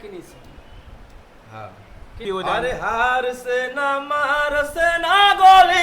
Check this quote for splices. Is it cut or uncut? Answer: cut